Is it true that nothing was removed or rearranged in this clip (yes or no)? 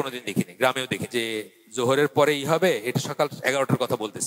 no